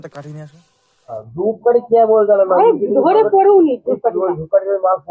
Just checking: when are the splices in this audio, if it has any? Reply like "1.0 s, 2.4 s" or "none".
1.2 s